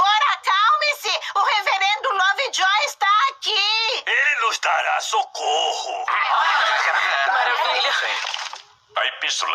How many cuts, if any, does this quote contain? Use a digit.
2